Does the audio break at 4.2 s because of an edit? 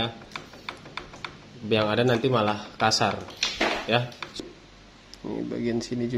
yes; 1 cut; at 4.2 s

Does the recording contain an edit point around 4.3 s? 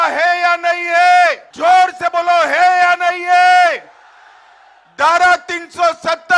no; 1 cut; at 1.5 s

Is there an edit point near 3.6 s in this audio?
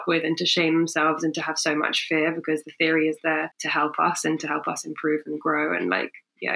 yes; 1 cut; at 3.6 s

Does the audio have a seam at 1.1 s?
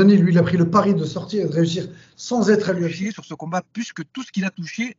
no; 1 cut; at 2.9 s

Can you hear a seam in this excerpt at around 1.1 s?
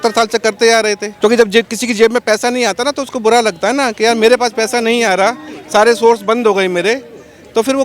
yes; 1 cut; at 1.1 s

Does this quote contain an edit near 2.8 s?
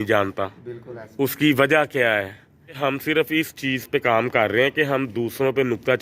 yes; 1 cut; at 2.8 s

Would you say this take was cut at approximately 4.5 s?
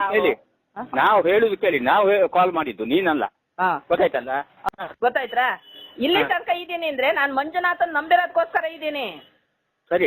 yes; 1 cut; at 4.5 s

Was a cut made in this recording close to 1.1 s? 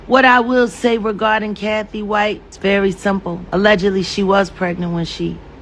no; 2 cuts; at 2.5 s, 3.4 s

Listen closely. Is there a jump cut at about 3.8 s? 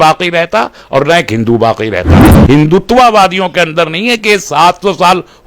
no; 1 cut; at 2.3 s

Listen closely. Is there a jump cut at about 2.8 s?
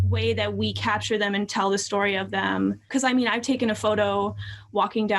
yes; 1 cut; at 2.8 s

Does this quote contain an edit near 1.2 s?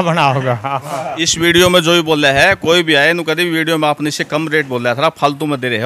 yes; 1 cut; at 1.2 s

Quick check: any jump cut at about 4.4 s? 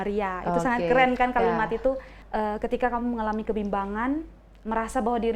no; 1 cut; at 2.1 s

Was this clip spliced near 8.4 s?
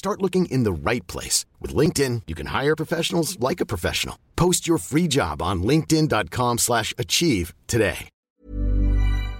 yes; 1 cut; at 8.4 s

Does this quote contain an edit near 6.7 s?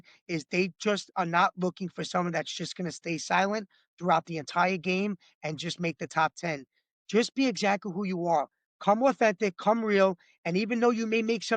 no; 0 cuts

